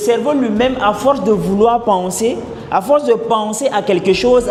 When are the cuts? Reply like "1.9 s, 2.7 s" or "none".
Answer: none